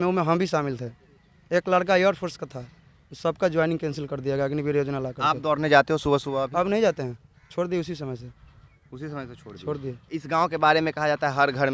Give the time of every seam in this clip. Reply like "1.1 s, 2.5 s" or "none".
none